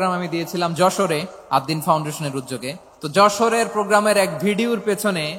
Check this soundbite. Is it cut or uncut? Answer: cut